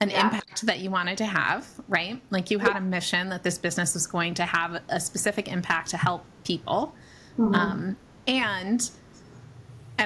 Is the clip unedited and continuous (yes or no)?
yes